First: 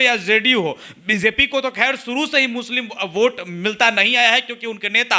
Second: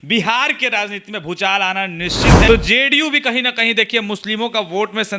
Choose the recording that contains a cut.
second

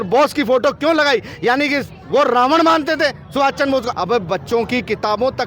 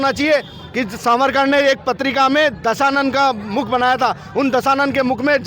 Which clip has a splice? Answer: first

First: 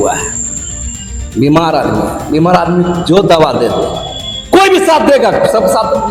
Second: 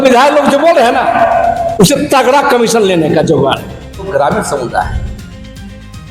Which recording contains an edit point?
second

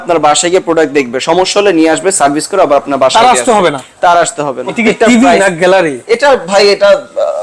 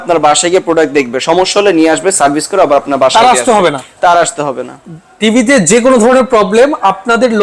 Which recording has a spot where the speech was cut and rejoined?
first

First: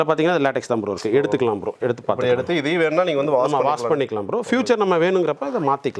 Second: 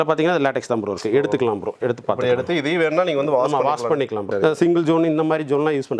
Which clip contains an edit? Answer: second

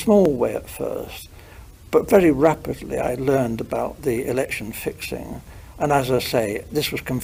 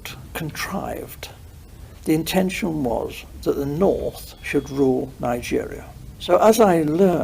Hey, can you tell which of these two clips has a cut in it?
second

